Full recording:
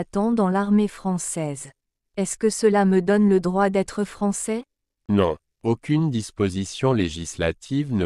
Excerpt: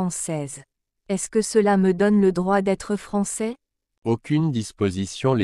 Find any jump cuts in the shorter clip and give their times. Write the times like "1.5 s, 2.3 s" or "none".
3.9 s